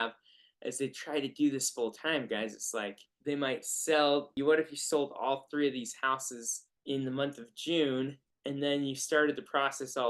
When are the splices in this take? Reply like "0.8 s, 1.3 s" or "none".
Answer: 3.1 s, 4.3 s